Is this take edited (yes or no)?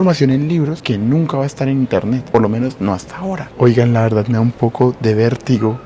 yes